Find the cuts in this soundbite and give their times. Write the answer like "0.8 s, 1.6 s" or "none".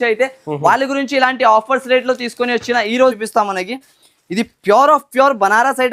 3.2 s